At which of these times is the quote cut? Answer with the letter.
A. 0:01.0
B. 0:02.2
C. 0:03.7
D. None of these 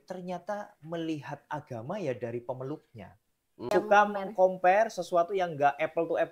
C